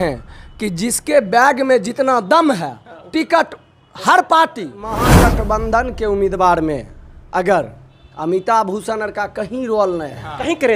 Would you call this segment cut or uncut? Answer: cut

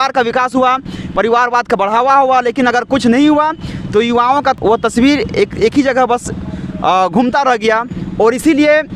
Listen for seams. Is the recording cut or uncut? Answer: uncut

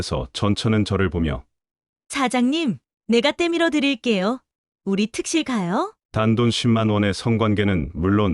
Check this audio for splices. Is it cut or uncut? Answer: cut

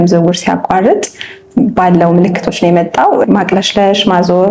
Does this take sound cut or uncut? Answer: cut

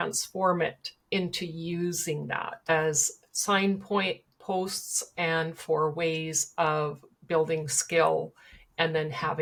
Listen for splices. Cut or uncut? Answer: uncut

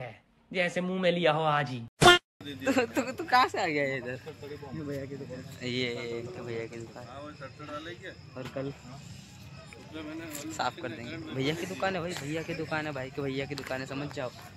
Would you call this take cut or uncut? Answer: cut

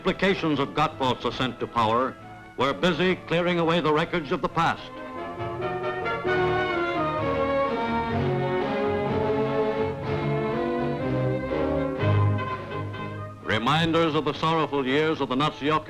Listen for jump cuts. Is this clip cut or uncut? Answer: cut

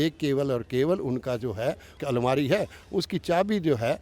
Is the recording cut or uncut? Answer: cut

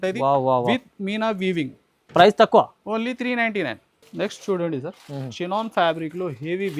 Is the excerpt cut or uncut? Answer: uncut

